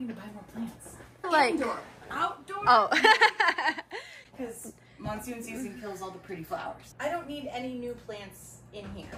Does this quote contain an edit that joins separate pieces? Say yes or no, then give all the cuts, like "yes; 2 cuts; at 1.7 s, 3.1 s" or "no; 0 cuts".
no; 0 cuts